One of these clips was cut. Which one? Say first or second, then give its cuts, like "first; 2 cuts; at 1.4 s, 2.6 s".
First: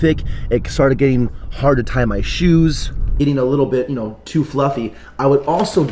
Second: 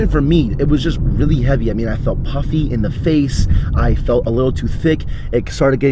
first; 1 cut; at 3.1 s